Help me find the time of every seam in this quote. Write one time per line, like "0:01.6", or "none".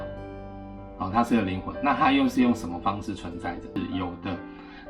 0:03.8